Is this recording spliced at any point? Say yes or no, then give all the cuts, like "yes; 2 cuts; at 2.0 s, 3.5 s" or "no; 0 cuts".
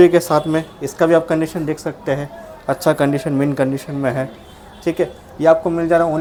no; 0 cuts